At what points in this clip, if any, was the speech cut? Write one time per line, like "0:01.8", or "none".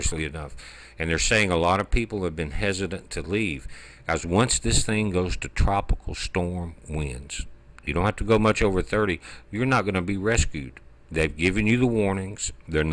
0:03.8